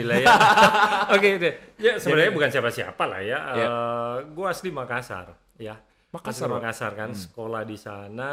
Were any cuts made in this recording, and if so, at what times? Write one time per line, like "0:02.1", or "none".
none

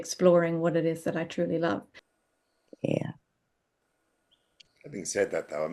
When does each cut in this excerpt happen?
0:02.0

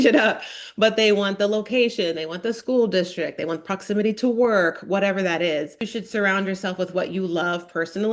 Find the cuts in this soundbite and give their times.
0:05.9

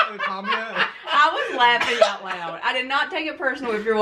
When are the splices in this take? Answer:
none

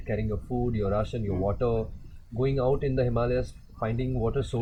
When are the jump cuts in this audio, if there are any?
none

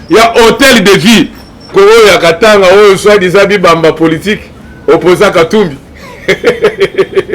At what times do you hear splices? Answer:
0:01.7

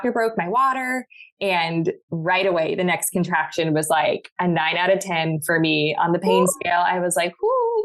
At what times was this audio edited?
none

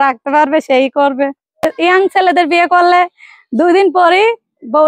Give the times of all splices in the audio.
0:01.6

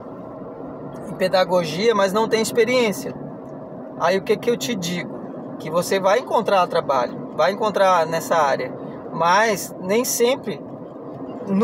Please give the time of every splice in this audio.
none

